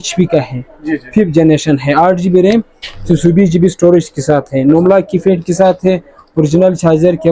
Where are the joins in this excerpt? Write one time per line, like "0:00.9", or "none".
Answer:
none